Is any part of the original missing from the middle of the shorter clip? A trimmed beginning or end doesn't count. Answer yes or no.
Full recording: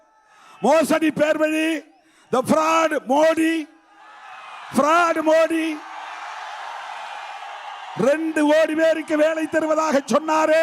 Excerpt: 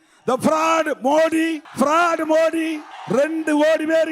yes